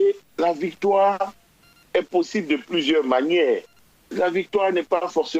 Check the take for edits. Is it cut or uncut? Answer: uncut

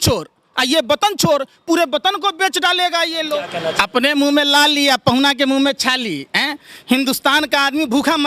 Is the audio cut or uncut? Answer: cut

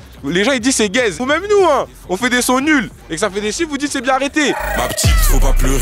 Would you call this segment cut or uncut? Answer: cut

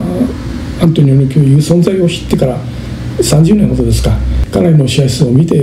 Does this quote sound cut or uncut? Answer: cut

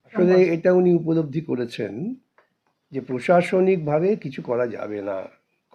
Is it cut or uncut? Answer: uncut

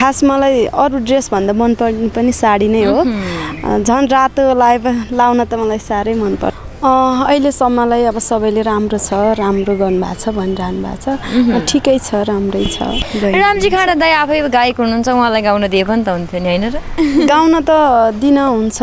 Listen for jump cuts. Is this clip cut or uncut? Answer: cut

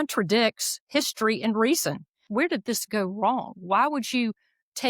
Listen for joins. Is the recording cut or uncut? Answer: cut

